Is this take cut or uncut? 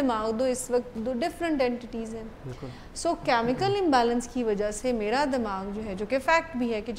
uncut